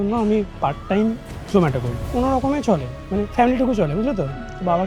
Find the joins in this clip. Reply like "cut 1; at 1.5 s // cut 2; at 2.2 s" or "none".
cut 1; at 2.0 s // cut 2; at 3.3 s